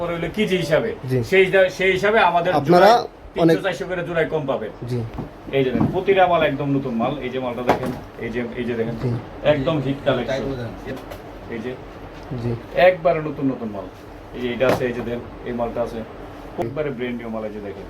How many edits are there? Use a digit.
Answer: 3